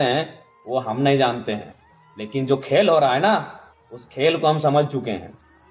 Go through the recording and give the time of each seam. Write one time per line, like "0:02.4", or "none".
none